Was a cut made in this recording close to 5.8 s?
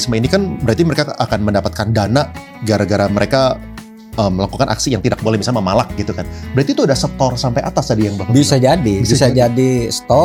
no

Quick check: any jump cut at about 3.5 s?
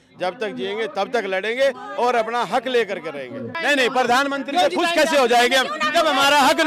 yes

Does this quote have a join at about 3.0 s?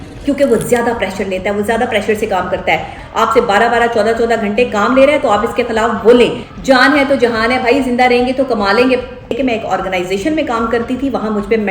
yes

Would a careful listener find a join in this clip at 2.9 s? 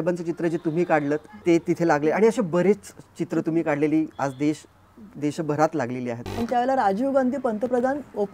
no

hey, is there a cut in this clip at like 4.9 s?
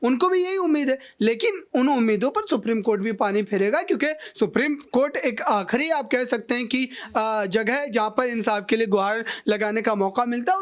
no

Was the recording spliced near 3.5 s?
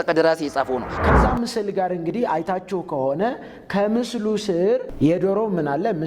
no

